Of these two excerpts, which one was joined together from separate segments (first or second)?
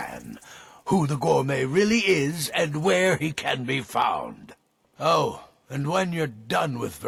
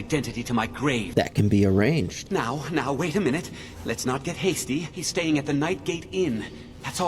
second